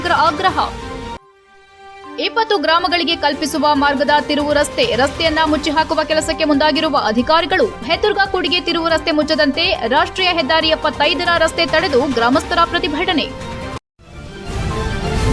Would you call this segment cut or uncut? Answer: cut